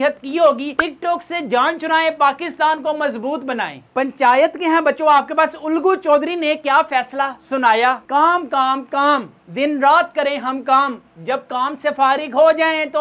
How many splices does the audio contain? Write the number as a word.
zero